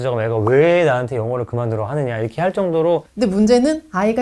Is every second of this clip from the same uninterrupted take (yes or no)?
no